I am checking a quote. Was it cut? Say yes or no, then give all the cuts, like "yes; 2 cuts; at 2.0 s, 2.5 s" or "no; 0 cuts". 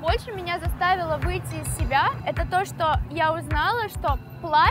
yes; 1 cut; at 2.2 s